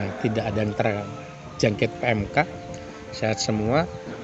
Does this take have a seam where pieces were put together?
no; 0 cuts

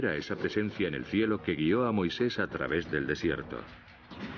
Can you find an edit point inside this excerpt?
no; 0 cuts

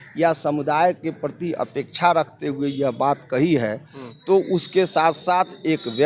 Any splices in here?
no; 0 cuts

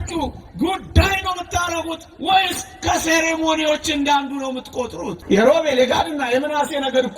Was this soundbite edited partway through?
yes; 1 cut; at 5.2 s

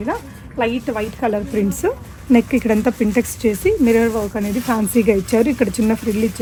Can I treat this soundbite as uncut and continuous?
yes; 0 cuts

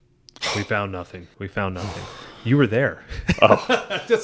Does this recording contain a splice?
yes; 1 cut; at 1.2 s

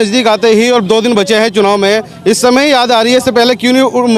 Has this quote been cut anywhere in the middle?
no; 0 cuts

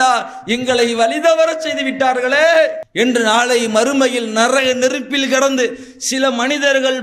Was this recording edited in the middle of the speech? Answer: no; 0 cuts

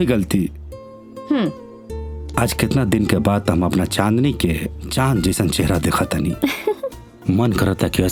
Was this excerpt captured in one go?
yes; 0 cuts

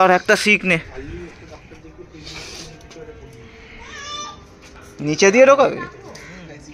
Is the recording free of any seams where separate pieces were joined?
yes; 0 cuts

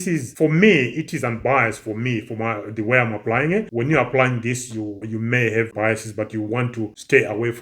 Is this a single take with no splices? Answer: yes; 0 cuts

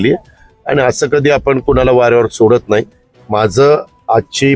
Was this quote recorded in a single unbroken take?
yes; 0 cuts

